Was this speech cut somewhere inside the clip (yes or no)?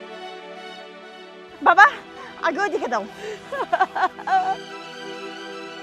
yes